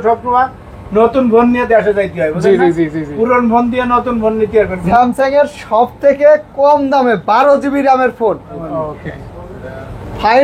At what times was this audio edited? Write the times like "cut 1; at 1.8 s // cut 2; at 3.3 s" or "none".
cut 1; at 4.8 s // cut 2; at 8.6 s